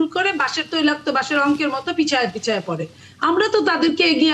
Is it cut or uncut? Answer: uncut